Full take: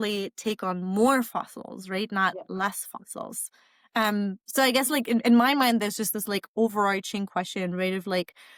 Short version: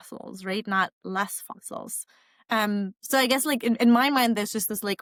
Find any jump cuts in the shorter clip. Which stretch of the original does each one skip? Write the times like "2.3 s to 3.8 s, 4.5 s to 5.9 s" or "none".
none